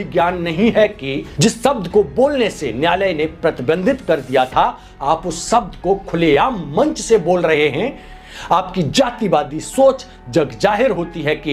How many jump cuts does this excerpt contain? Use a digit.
0